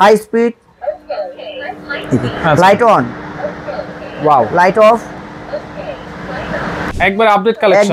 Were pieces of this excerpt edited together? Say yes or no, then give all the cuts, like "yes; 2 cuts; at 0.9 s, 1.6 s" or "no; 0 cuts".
yes; 1 cut; at 6.9 s